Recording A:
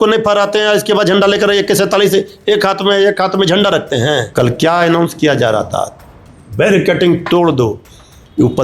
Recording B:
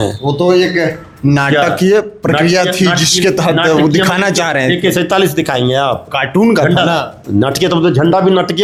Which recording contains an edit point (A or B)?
A